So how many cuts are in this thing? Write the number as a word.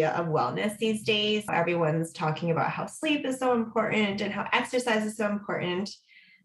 one